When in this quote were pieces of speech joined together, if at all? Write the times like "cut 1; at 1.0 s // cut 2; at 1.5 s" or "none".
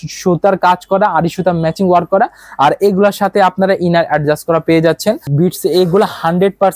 cut 1; at 5.3 s

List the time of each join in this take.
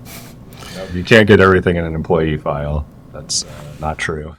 none

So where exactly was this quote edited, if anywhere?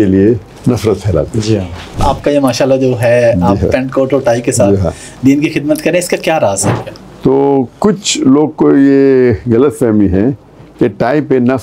cut 1; at 2.0 s // cut 2; at 6.7 s

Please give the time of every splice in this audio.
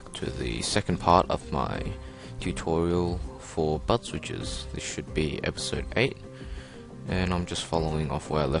none

